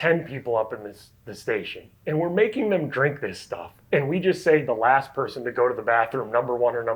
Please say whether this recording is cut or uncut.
uncut